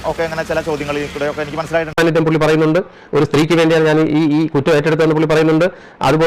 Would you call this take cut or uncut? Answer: cut